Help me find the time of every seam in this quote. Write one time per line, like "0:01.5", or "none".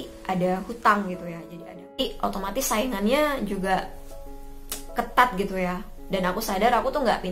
0:02.0